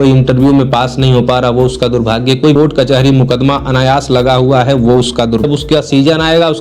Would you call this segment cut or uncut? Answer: cut